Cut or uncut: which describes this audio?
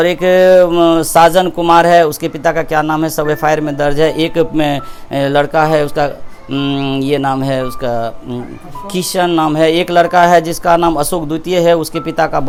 uncut